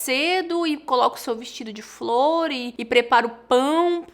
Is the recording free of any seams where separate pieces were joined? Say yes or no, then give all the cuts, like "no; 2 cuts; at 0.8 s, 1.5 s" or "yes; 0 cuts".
no; 1 cut; at 2.7 s